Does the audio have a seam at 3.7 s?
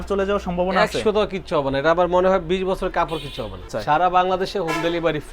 yes; 1 cut; at 3.7 s

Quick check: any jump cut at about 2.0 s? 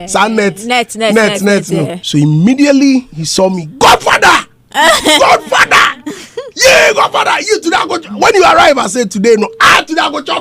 yes; 1 cut; at 2.0 s

